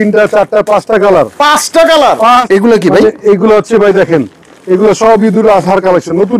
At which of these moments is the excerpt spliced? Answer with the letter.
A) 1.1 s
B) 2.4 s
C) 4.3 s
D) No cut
B